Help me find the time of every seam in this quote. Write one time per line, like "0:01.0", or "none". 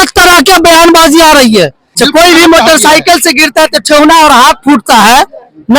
0:01.9